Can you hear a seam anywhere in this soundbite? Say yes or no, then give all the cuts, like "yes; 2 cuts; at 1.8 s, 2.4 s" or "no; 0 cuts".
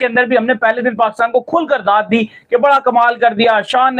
no; 0 cuts